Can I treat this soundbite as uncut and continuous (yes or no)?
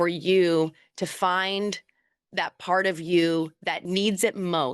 no